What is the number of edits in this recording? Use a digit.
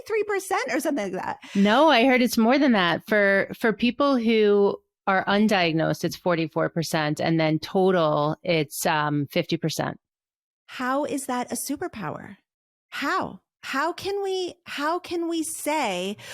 1